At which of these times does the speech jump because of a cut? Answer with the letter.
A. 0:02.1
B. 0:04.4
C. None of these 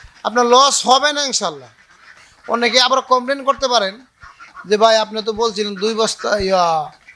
A